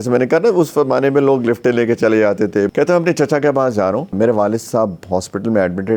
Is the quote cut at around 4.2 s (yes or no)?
yes